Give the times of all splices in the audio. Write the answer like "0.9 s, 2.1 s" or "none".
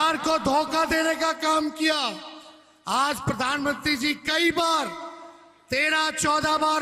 none